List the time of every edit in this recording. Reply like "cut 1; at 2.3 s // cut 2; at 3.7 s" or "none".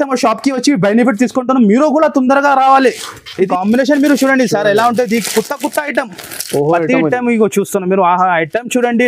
cut 1; at 3.5 s